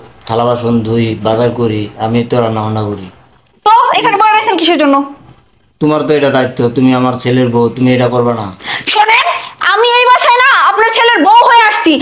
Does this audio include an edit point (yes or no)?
no